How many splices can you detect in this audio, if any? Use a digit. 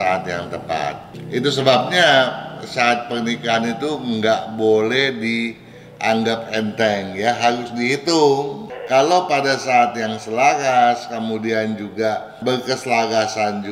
3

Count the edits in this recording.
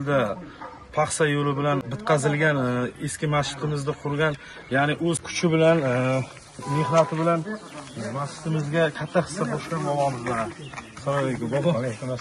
2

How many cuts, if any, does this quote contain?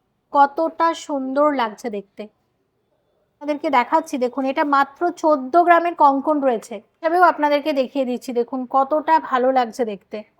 2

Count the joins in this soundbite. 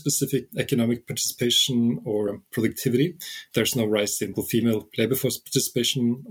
2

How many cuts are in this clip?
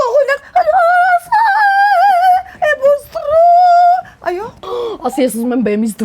1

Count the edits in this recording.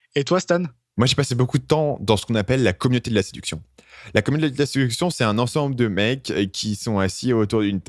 1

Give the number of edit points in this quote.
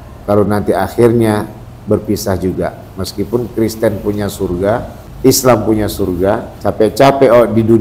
2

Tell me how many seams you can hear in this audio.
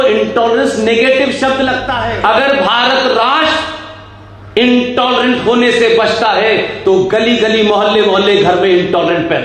1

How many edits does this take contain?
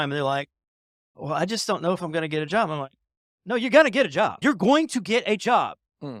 0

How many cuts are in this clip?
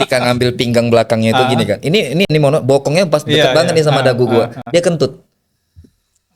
0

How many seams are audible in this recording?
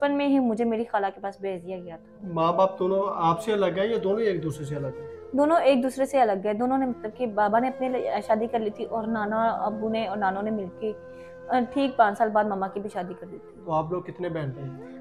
0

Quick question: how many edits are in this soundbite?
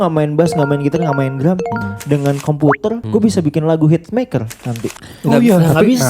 1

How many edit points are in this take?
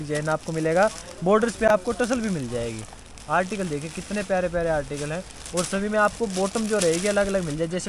0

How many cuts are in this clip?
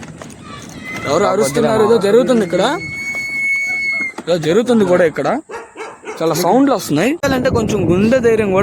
1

